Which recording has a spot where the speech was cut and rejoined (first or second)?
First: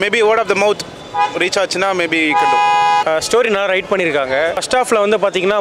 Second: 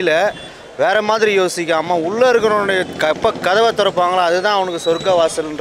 first